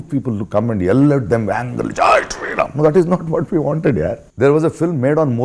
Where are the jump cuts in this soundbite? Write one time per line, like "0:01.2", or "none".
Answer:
0:04.2